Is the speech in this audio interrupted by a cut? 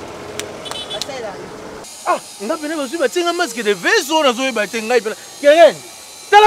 yes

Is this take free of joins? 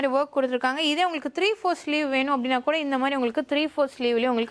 yes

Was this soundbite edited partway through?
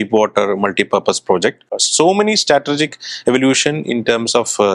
yes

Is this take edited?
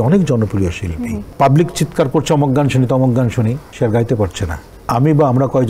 yes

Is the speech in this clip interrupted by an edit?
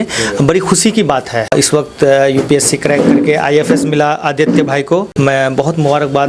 yes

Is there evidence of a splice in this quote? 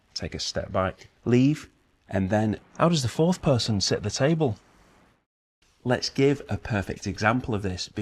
yes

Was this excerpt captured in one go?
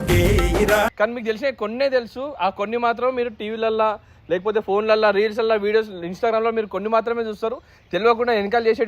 no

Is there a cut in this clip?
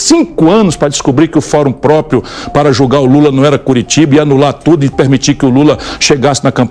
no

